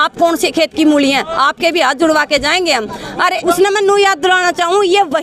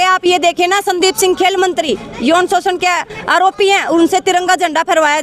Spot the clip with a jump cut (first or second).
first